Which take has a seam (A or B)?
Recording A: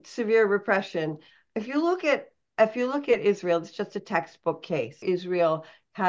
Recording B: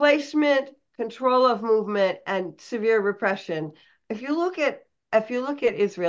A